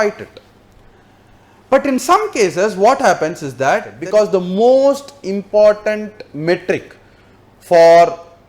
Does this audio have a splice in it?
yes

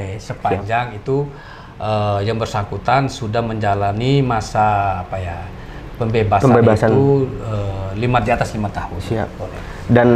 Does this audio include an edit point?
no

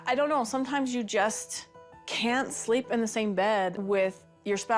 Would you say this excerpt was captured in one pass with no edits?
no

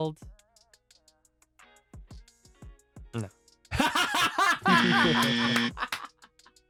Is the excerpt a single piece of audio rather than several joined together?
yes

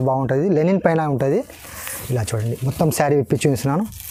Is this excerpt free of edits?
yes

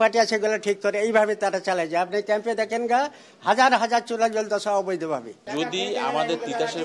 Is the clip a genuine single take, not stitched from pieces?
no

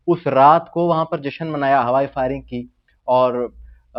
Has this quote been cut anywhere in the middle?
no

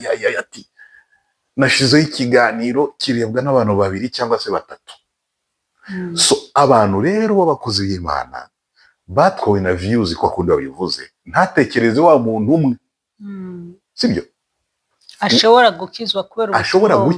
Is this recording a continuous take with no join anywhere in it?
yes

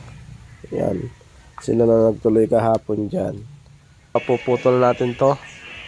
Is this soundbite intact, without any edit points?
no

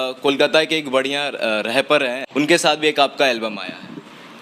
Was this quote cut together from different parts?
yes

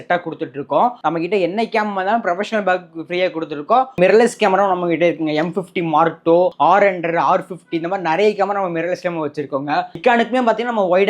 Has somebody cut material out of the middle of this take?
yes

